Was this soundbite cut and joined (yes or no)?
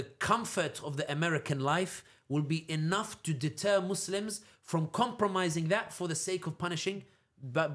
no